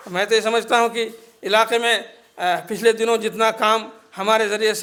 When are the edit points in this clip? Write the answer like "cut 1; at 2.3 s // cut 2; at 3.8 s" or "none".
none

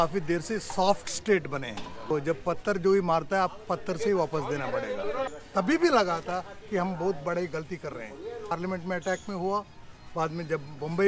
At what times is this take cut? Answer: cut 1; at 2.1 s // cut 2; at 5.4 s // cut 3; at 8.5 s

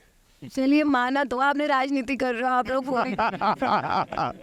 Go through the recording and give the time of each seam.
none

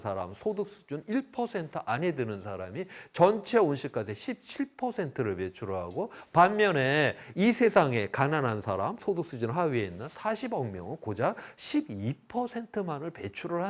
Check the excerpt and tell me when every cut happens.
cut 1; at 6.1 s // cut 2; at 9.0 s

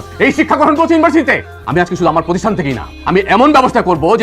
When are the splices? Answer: cut 1; at 1.5 s

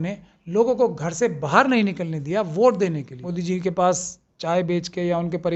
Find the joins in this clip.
cut 1; at 3.3 s

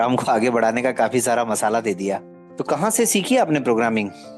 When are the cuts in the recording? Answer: cut 1; at 2.4 s

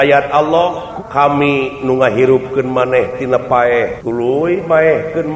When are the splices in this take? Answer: cut 1; at 0.9 s // cut 2; at 4.0 s

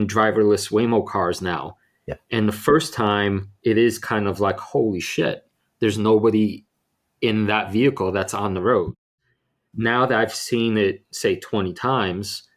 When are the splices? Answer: none

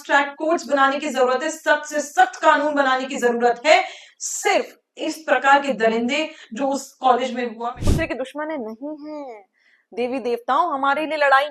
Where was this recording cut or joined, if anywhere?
cut 1; at 7.6 s

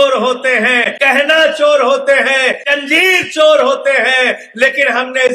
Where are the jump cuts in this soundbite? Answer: cut 1; at 0.9 s // cut 2; at 2.7 s

